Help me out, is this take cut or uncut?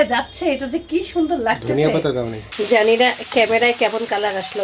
cut